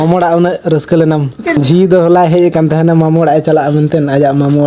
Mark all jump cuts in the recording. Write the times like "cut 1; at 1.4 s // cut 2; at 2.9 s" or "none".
cut 1; at 1.6 s